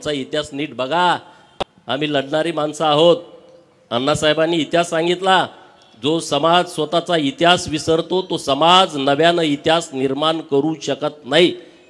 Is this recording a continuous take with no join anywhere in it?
yes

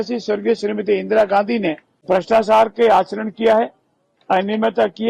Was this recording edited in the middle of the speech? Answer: yes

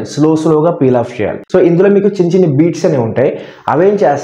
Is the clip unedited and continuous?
no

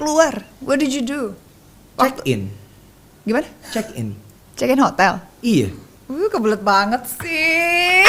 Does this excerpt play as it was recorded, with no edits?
yes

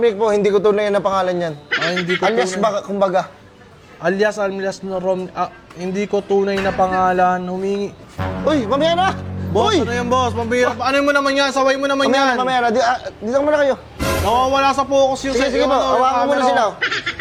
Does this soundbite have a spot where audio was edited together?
no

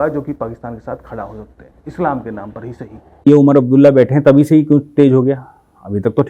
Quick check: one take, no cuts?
no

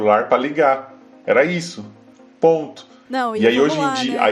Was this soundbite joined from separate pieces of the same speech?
no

